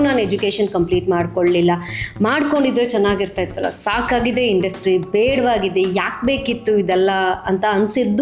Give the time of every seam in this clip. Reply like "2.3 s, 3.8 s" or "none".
none